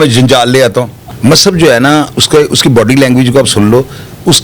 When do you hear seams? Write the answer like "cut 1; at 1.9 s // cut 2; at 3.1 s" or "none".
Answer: cut 1; at 0.9 s